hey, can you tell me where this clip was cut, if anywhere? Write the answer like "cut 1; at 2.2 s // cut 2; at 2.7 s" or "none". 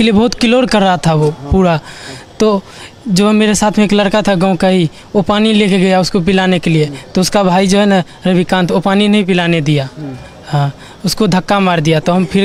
none